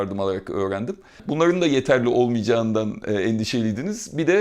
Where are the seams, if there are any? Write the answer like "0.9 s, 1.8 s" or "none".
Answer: 1.0 s